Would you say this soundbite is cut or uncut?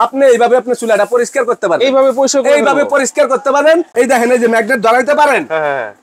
cut